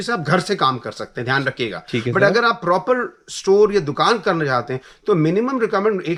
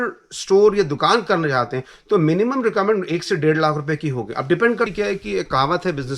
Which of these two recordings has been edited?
second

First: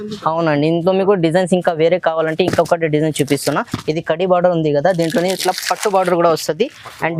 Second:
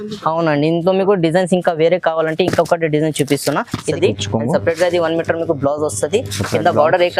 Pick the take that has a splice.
second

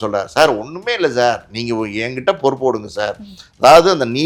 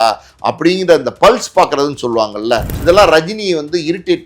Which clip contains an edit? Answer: second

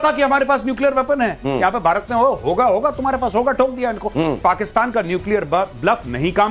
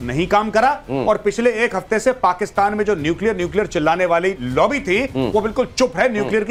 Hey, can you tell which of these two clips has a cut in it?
first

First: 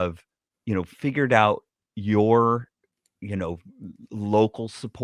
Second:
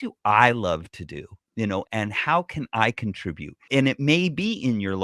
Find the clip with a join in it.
second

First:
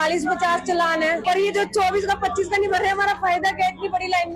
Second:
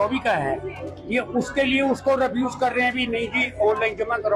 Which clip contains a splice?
first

